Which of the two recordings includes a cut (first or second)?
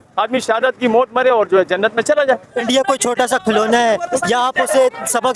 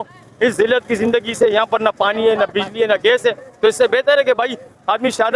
first